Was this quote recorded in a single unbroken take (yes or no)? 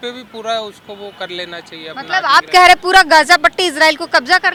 yes